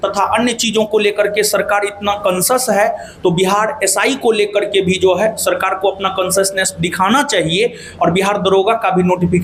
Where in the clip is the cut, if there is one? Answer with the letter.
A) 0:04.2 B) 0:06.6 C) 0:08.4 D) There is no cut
D